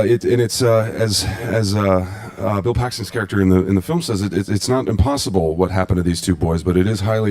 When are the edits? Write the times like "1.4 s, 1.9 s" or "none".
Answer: 3.4 s